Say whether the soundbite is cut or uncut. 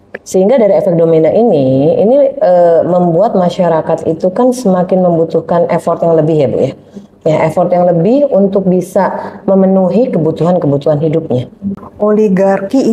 cut